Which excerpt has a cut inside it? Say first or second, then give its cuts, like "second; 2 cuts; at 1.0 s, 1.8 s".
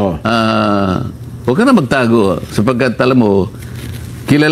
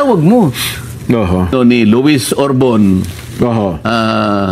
second; 1 cut; at 1.5 s